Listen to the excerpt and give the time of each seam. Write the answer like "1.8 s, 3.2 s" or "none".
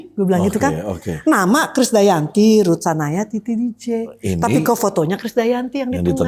none